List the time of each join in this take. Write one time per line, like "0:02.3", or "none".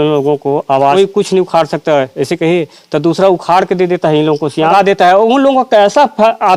0:00.9
0:04.7